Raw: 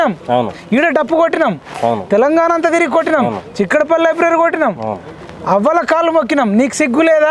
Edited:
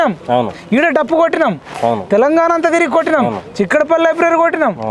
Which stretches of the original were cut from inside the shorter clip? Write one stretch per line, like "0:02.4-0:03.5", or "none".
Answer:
none